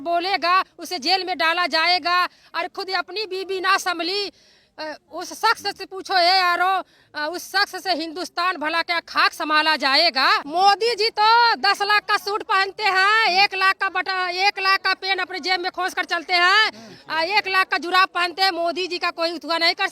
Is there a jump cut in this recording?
yes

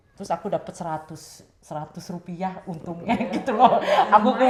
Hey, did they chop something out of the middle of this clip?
no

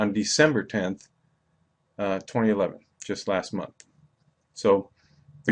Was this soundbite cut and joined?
yes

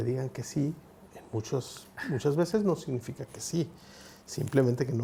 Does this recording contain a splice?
no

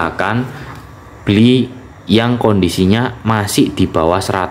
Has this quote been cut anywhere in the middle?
no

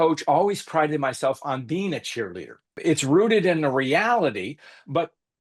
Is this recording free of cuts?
no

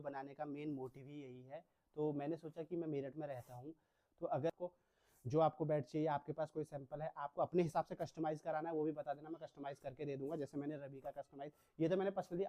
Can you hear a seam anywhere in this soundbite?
yes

